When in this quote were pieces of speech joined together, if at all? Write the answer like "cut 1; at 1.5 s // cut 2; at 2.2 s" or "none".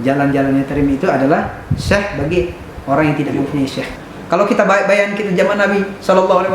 cut 1; at 4.0 s